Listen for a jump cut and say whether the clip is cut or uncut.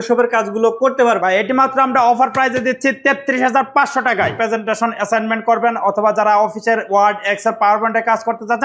cut